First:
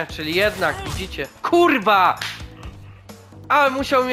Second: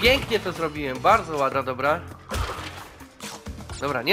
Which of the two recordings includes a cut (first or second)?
second